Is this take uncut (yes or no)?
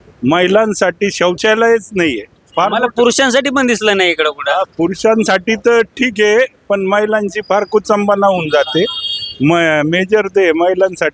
yes